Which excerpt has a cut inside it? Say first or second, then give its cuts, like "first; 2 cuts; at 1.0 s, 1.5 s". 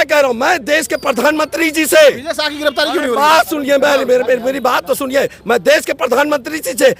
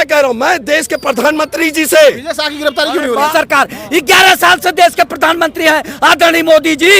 second; 1 cut; at 3.3 s